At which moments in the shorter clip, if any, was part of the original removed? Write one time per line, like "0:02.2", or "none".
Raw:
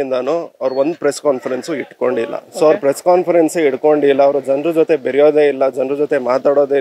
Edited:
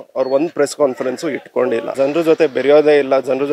0:01.9